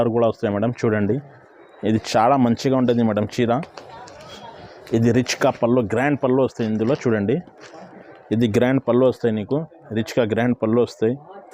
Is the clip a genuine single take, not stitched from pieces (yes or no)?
yes